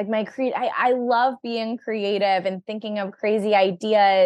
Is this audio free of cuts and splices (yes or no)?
yes